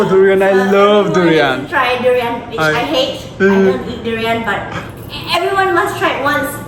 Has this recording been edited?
no; 0 cuts

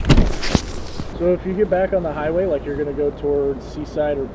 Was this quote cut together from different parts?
yes; 1 cut; at 0.9 s

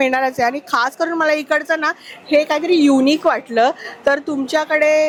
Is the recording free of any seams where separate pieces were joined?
yes; 0 cuts

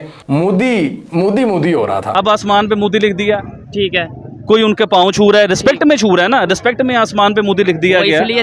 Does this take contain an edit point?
yes; 1 cut; at 2.1 s

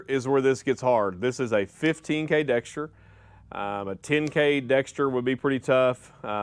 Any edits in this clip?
no; 0 cuts

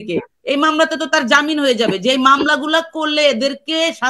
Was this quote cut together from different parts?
no; 0 cuts

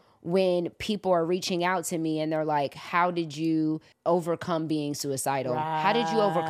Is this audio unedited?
no; 1 cut; at 3.9 s

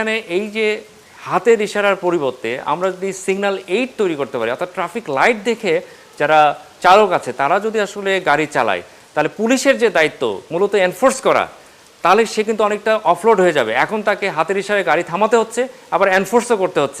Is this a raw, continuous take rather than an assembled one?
yes; 0 cuts

